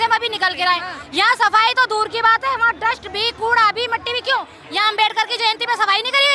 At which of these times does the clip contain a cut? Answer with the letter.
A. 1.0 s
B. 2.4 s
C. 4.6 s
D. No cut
C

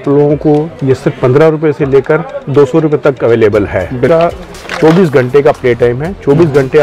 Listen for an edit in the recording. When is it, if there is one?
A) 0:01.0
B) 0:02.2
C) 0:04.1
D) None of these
C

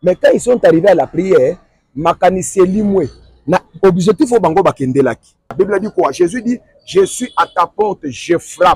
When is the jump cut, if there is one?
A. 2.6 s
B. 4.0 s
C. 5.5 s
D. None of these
C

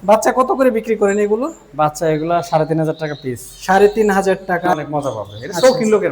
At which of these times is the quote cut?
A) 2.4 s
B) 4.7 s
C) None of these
B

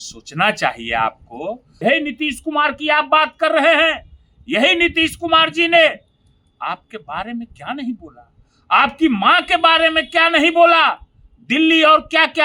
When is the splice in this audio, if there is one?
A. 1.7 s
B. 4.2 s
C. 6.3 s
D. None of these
A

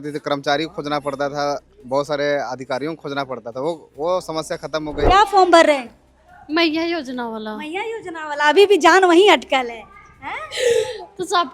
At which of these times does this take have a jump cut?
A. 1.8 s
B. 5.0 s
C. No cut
B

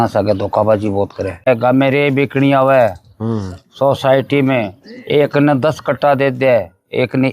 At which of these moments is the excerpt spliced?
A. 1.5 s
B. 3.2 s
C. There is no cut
A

